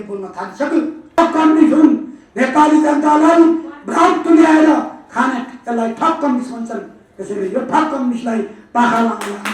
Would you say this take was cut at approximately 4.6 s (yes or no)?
no